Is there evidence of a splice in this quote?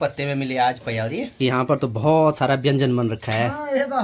no; 0 cuts

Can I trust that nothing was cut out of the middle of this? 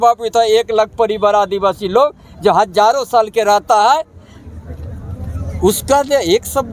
yes; 0 cuts

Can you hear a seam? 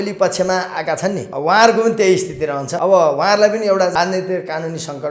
yes; 3 cuts; at 1.3 s, 2.7 s, 3.9 s

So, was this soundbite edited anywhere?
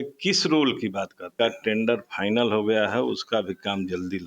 yes; 1 cut; at 1.2 s

